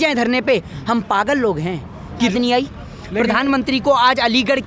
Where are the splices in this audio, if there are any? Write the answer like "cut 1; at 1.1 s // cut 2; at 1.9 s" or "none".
cut 1; at 2.3 s